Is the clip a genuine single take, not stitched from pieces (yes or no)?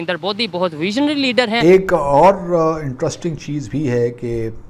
no